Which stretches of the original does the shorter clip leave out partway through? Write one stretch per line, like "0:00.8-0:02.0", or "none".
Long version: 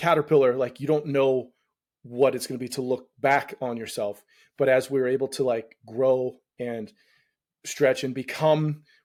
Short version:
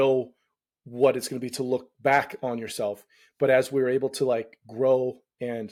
none